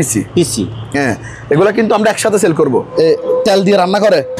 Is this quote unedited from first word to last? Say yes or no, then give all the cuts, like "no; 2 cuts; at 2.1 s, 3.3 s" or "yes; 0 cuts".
no; 1 cut; at 2.9 s